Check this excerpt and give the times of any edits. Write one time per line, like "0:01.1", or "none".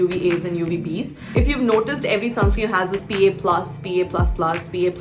0:01.3